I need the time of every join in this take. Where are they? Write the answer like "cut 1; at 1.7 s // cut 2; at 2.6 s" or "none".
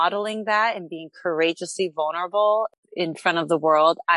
cut 1; at 2.8 s